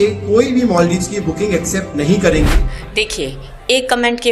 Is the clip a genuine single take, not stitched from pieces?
no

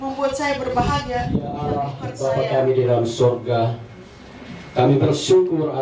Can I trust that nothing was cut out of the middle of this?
no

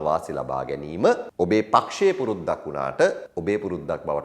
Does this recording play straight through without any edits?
no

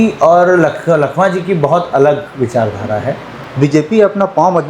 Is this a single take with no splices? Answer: no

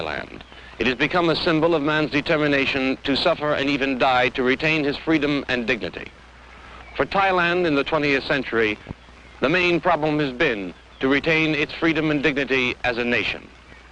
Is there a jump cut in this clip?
no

